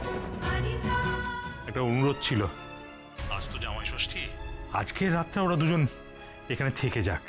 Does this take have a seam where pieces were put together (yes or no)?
yes